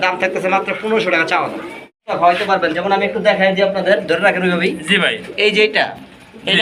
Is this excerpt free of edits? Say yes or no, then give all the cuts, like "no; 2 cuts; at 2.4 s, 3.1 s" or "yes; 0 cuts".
no; 1 cut; at 2.0 s